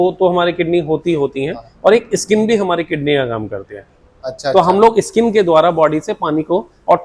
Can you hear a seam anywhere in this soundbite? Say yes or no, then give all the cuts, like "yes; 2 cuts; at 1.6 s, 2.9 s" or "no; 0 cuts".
no; 0 cuts